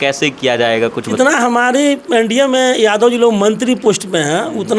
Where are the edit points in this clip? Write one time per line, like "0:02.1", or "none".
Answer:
0:01.2